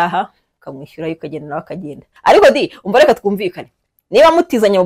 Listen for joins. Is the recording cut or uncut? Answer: cut